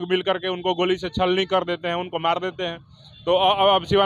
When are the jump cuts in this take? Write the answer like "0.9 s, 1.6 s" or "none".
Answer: none